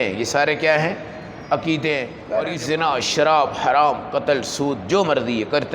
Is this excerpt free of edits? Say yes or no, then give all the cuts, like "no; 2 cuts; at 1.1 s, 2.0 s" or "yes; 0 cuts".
no; 1 cut; at 2.2 s